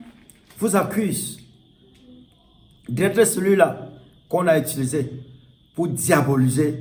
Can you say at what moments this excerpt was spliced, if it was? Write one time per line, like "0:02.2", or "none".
none